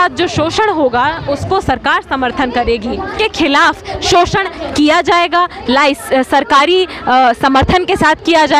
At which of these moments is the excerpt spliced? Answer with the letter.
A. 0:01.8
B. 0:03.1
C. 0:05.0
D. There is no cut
B